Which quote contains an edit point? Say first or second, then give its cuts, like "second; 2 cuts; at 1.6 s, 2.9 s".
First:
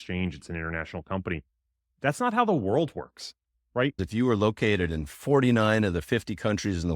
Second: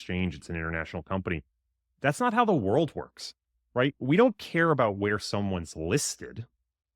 first; 1 cut; at 4.0 s